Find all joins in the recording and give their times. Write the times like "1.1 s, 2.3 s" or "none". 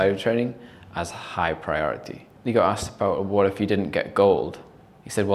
2.2 s

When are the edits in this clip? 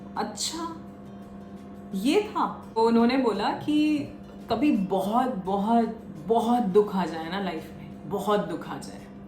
2.8 s

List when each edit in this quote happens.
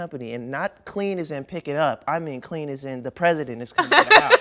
none

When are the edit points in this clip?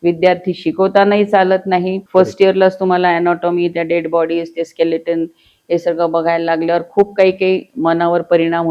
2.0 s

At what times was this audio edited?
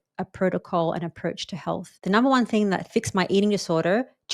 1.9 s, 2.9 s

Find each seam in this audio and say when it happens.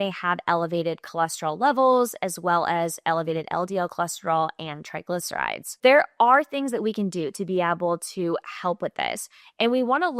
5.6 s

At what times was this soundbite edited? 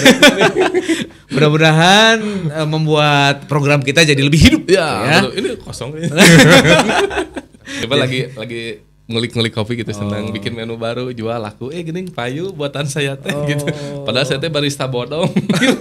7.8 s

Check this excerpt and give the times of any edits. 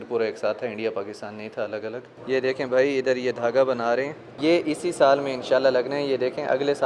2.1 s, 4.3 s

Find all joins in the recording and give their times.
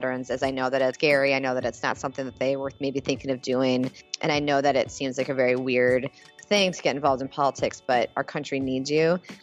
1.0 s, 4.1 s

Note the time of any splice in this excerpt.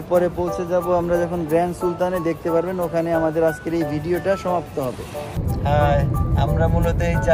5.3 s

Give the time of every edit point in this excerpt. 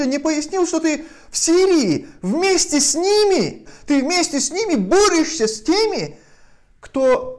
3.7 s

